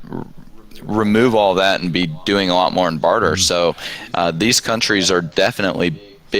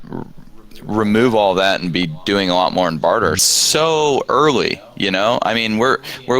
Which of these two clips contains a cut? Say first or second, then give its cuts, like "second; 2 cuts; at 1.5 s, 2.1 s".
second; 1 cut; at 3.4 s